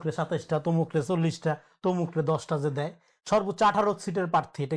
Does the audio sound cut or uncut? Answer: uncut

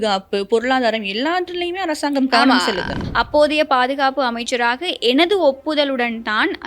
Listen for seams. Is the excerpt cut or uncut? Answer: cut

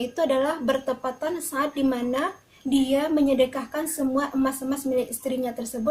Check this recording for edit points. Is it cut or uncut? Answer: uncut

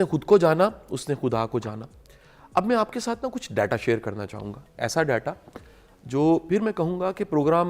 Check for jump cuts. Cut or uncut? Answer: uncut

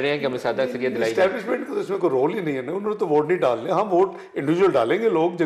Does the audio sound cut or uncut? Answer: uncut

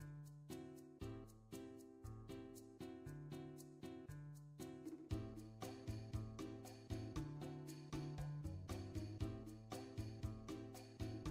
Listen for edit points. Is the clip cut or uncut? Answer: uncut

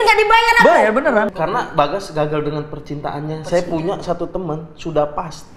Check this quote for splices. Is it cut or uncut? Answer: cut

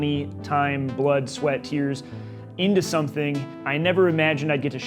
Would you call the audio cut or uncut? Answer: cut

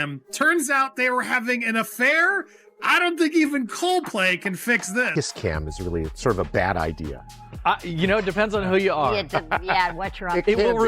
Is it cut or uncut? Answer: cut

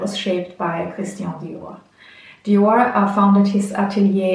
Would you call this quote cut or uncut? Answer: uncut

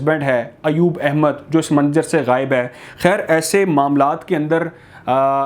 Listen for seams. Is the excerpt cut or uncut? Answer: uncut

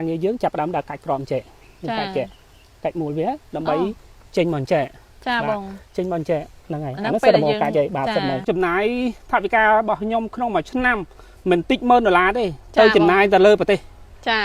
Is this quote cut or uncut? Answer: cut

